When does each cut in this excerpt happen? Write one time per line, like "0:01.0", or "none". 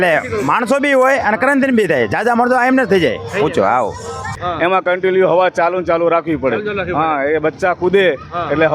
0:04.4